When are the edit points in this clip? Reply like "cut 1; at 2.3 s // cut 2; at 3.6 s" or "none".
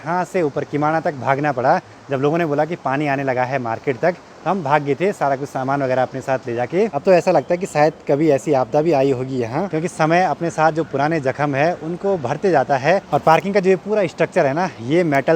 none